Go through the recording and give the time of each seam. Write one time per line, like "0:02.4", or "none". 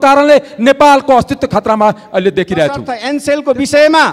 0:02.9